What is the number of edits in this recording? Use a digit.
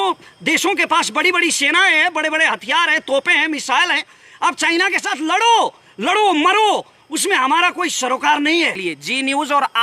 1